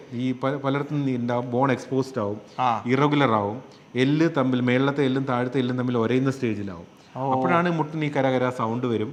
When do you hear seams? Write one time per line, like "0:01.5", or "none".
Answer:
none